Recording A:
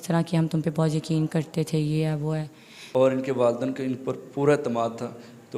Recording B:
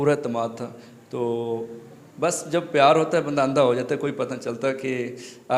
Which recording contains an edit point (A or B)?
A